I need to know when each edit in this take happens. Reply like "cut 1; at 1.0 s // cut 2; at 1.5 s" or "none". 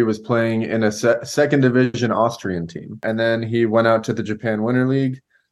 cut 1; at 3.0 s

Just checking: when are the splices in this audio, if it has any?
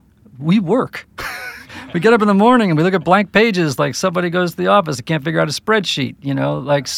none

